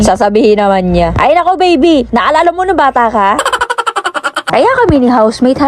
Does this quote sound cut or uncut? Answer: cut